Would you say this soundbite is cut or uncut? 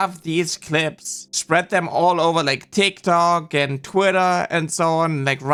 uncut